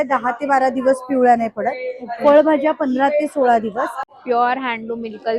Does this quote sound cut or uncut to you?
cut